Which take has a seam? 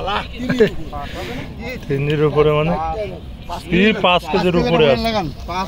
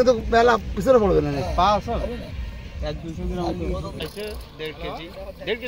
second; 1 cut; at 4.1 s

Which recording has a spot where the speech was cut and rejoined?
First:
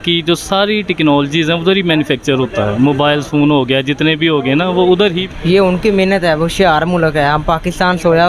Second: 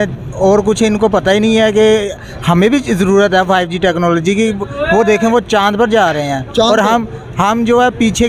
first; 1 cut; at 5.2 s

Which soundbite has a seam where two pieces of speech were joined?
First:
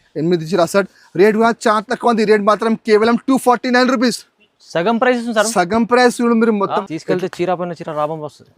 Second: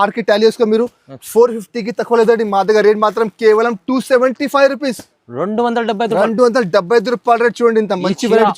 first; 1 cut; at 6.8 s

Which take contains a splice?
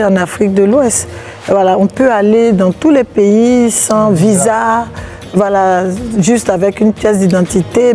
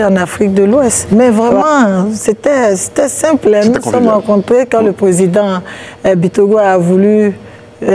second; 1 cut; at 1.0 s

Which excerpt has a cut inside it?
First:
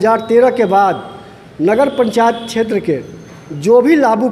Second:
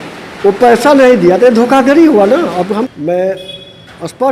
second; 1 cut; at 2.9 s

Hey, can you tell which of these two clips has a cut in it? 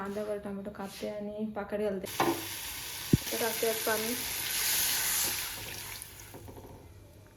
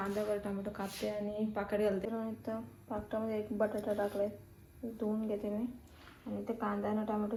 first; 1 cut; at 2.1 s

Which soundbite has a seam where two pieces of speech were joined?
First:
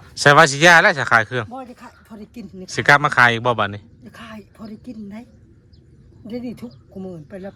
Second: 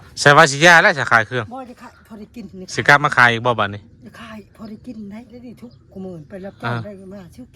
second; 1 cut; at 5.5 s

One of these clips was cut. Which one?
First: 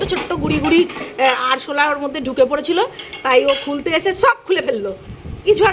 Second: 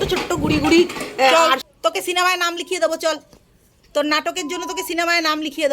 second; 1 cut; at 1.3 s

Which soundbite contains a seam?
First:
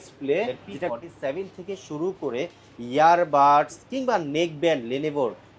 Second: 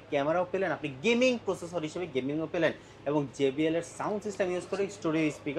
first; 1 cut; at 0.9 s

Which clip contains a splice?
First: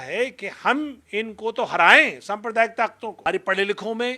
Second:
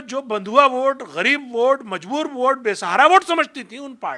first; 1 cut; at 3.2 s

